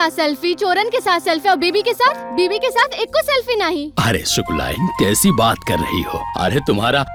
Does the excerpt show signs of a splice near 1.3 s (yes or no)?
no